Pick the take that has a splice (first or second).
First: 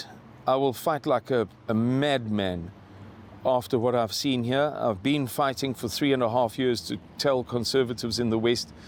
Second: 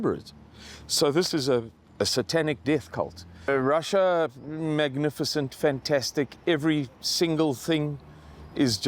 second